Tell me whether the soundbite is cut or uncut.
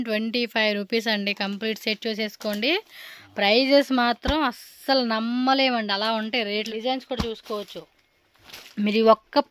cut